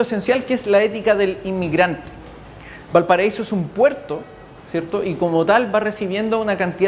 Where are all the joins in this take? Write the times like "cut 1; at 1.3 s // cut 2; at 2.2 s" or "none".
cut 1; at 1.3 s

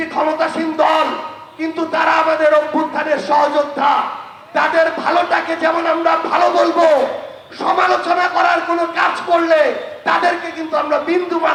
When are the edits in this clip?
none

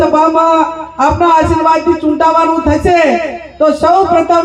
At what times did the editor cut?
none

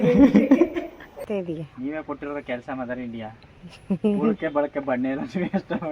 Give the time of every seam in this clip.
cut 1; at 1.2 s

